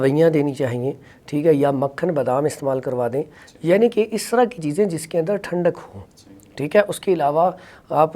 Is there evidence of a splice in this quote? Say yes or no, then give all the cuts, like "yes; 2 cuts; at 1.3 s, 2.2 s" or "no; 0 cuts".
no; 0 cuts